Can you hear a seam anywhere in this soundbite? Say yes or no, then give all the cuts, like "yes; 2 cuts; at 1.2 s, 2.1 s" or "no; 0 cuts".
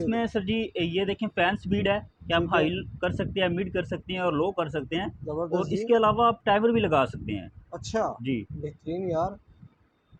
no; 0 cuts